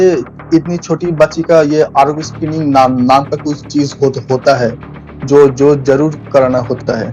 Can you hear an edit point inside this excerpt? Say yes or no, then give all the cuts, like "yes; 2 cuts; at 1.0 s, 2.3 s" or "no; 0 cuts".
no; 0 cuts